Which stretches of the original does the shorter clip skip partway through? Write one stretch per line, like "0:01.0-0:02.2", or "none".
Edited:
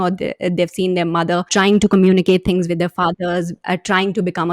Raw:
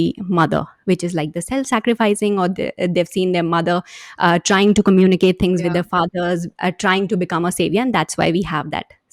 0:03.9-0:04.4